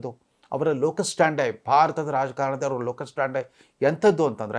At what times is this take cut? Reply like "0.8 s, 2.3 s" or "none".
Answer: none